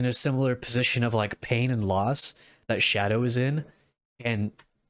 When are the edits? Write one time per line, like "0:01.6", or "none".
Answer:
none